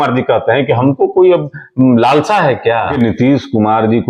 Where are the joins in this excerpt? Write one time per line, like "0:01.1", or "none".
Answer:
0:02.9